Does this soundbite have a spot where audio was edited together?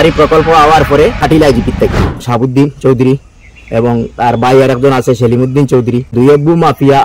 yes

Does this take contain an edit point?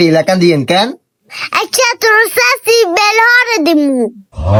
no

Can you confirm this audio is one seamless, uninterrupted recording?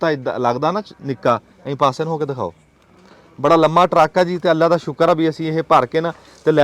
yes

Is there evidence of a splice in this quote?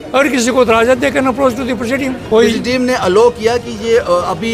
yes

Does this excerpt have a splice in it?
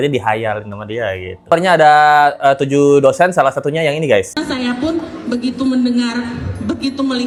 no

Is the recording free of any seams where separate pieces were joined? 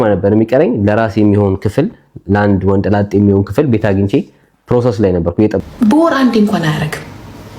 no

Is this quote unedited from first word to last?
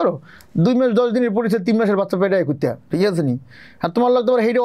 yes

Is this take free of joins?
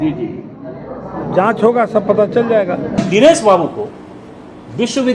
no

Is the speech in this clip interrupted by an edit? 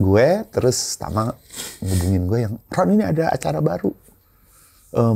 no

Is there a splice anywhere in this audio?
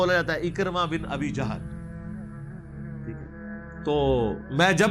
yes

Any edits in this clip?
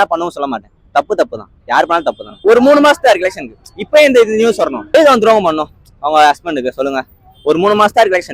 yes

